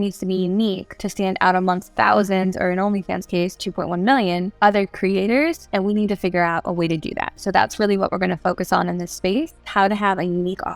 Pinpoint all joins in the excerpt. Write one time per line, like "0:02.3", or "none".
0:00.9
0:01.9
0:04.5
0:05.6
0:09.7